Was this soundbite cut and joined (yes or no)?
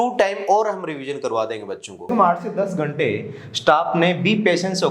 yes